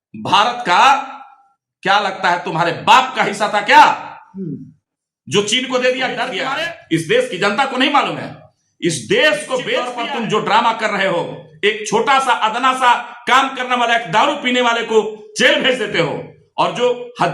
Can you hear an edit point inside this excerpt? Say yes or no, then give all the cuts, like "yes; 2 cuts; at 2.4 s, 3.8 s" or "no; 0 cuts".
yes; 2 cuts; at 6.4 s, 9.9 s